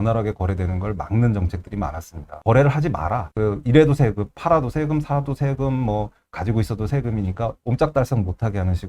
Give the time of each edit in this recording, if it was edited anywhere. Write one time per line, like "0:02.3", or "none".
0:02.3
0:03.2